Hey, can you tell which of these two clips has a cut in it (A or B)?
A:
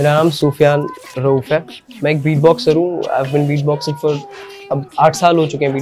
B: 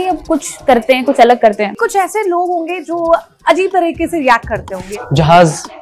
B